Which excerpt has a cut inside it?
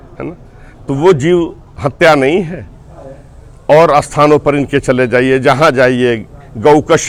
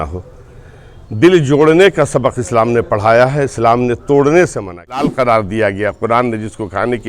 second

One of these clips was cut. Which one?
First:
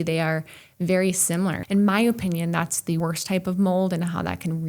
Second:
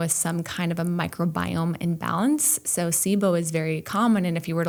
first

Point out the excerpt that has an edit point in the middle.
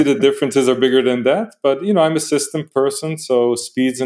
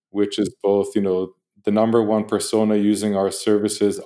first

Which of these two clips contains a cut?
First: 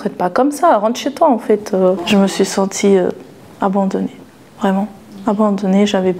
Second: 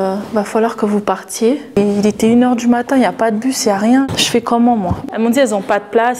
second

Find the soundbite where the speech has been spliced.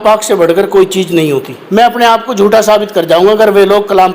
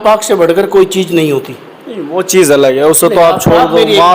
first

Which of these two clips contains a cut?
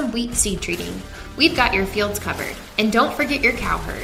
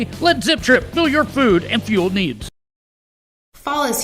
second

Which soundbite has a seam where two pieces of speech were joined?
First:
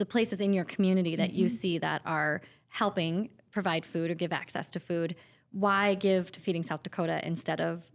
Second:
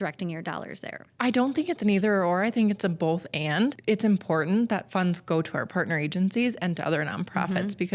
second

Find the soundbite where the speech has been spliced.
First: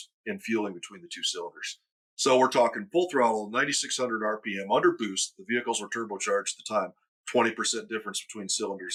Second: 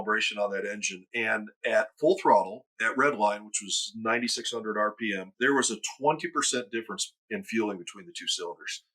second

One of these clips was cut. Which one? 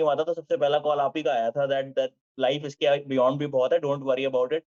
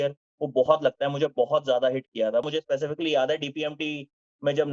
second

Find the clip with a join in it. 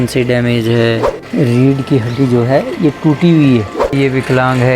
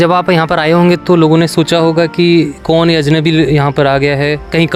first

